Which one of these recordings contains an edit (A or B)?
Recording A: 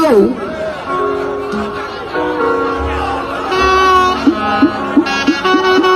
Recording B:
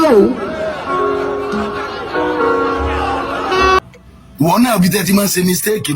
B